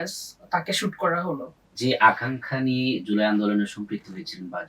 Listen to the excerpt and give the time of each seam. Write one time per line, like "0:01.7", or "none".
0:01.7